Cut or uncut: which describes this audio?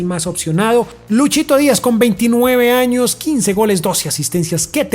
cut